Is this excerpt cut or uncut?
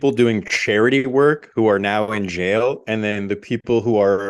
uncut